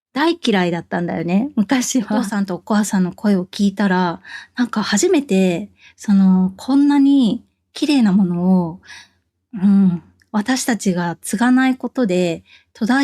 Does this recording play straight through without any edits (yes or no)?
no